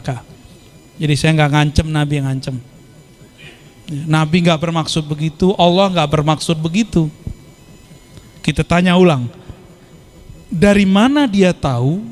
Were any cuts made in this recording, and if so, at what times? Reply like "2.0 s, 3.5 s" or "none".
none